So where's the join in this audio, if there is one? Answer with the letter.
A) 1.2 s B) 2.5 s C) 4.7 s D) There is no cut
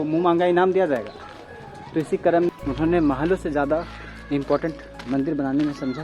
B